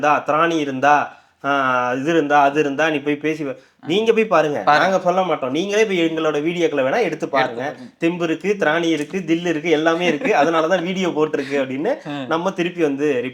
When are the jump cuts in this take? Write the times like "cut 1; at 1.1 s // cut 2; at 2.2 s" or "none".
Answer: none

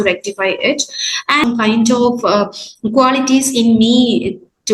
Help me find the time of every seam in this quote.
cut 1; at 1.4 s

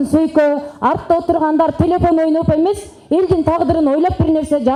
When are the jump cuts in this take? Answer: none

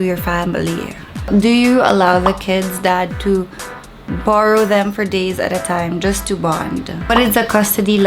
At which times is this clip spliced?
cut 1; at 1.2 s // cut 2; at 6.9 s

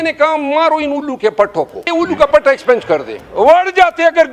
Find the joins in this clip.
cut 1; at 1.8 s // cut 2; at 3.2 s

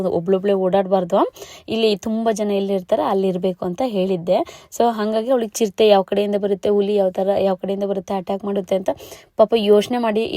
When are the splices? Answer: none

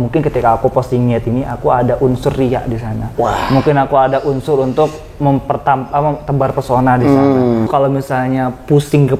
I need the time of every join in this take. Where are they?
cut 1; at 7.7 s

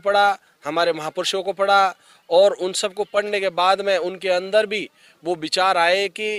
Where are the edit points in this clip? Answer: none

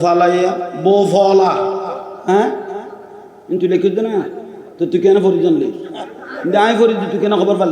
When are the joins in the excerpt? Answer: cut 1; at 2.1 s

